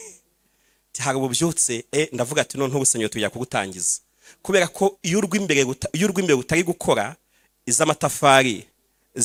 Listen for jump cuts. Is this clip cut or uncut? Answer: uncut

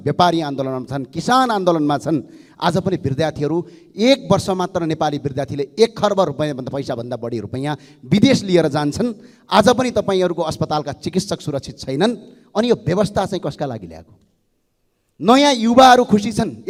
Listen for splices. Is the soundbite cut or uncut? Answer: uncut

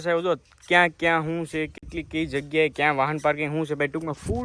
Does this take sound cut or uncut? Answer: uncut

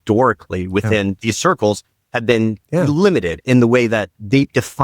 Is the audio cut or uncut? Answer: cut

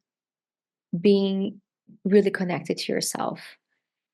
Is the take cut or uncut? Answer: cut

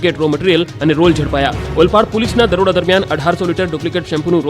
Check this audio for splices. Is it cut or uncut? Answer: cut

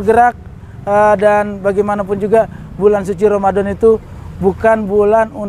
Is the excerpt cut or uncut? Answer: uncut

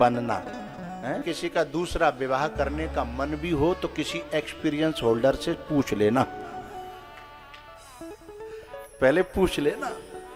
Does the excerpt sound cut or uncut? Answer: cut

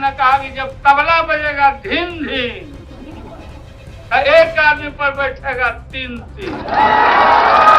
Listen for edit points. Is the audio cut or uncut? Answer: uncut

